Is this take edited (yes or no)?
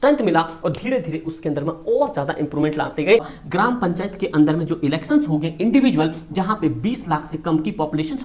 yes